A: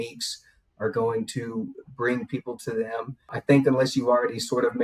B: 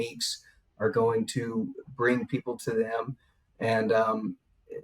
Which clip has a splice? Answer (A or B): A